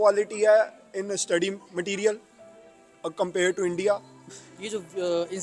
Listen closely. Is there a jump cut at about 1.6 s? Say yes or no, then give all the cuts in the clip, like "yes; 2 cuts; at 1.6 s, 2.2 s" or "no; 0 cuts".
no; 1 cut; at 4.2 s